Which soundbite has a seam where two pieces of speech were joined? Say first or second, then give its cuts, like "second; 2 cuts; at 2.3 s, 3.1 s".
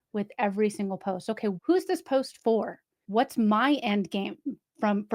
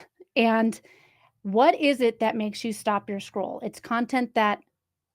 first; 2 cuts; at 1.6 s, 3.0 s